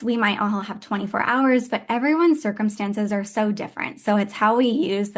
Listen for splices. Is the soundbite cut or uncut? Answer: uncut